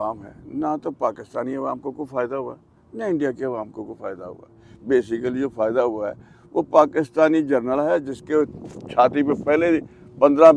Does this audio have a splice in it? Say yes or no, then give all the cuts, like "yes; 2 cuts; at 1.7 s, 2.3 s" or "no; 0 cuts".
no; 0 cuts